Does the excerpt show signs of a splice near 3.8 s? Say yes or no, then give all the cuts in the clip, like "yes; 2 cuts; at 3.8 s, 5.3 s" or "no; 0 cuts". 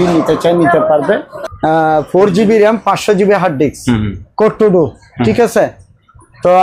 no; 1 cut; at 1.3 s